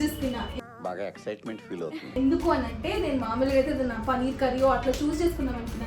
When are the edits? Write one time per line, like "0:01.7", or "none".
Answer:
none

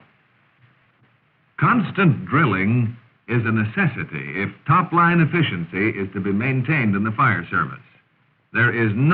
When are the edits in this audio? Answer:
0:05.2

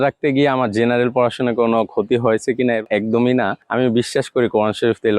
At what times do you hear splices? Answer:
0:02.9
0:03.6

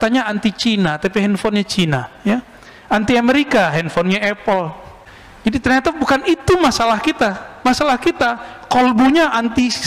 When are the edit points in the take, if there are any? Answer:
none

